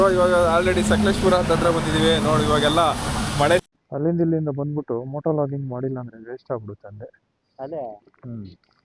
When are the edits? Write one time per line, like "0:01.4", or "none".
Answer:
0:03.7

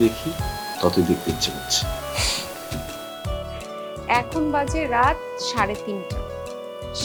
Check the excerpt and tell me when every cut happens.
none

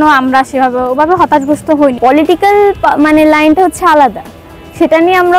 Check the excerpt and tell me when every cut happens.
0:02.0

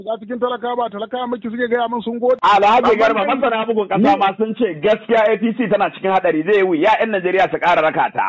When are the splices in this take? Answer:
0:02.4

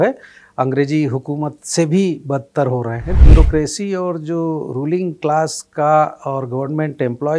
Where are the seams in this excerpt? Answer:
0:03.2

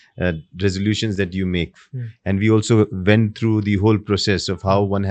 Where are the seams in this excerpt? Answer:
none

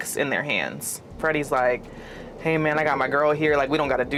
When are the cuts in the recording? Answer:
none

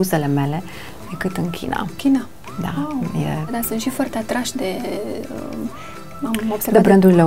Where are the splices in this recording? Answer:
0:03.5

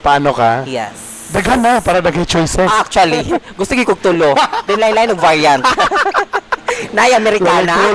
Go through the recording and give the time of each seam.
none

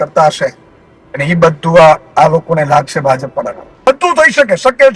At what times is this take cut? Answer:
0:03.9

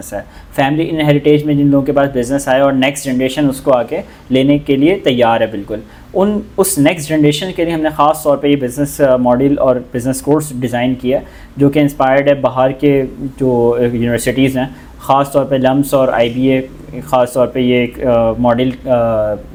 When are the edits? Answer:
none

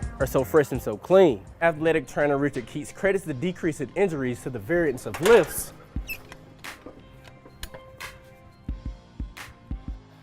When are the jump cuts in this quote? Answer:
0:01.6

